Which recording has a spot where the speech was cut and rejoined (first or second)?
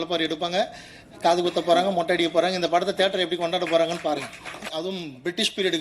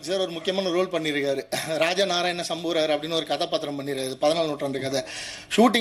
first